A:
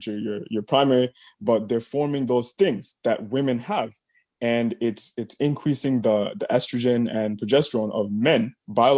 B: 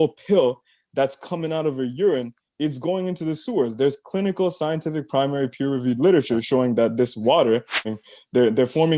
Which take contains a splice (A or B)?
B